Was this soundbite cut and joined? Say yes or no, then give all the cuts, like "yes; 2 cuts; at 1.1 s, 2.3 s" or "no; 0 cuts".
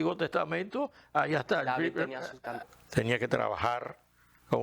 yes; 1 cut; at 2.6 s